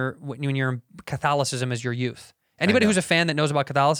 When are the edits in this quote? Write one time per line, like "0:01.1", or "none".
none